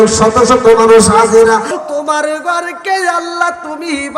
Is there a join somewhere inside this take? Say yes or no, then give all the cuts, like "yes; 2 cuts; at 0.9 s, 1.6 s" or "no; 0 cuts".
yes; 1 cut; at 1.7 s